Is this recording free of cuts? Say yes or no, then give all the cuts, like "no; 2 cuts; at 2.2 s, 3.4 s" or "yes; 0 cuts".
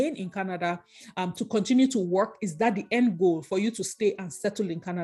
yes; 0 cuts